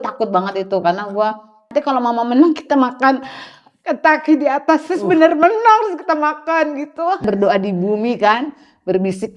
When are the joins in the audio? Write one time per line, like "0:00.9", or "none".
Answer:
0:01.7
0:07.3